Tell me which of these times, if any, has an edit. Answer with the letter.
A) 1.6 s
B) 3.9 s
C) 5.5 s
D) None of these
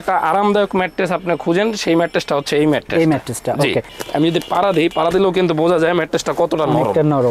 B